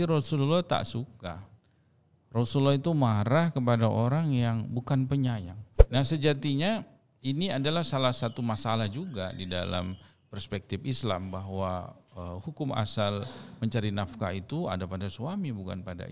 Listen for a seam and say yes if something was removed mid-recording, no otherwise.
yes